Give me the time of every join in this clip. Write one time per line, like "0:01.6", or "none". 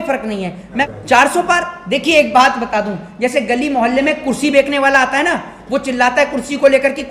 0:00.9